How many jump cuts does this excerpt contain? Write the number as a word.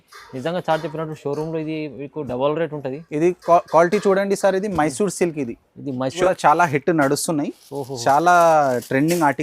one